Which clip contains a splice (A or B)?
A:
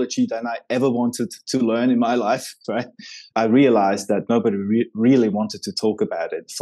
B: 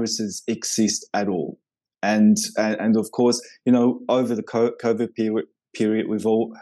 A